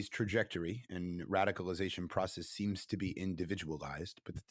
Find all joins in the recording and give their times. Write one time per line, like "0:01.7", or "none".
none